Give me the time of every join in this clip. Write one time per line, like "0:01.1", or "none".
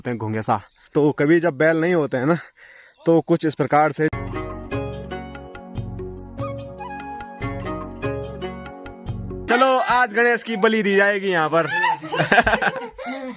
0:00.8
0:04.1
0:09.4